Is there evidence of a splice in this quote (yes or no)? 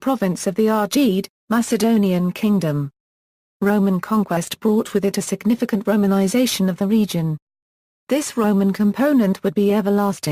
no